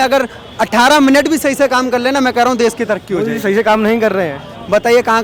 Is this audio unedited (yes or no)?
yes